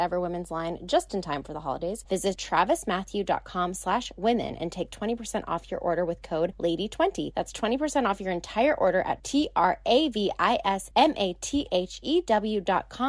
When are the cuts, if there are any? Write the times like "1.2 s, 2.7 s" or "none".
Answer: 2.3 s, 6.5 s, 7.3 s, 10.8 s